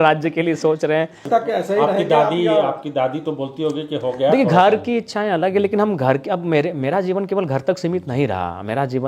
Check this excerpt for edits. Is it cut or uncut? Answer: cut